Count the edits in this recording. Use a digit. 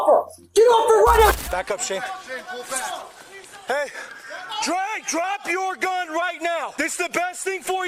2